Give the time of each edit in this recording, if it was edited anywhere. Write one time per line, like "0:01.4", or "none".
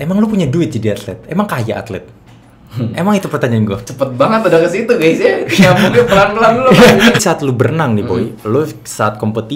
0:07.2